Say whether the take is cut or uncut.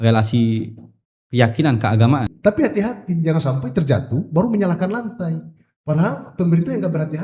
cut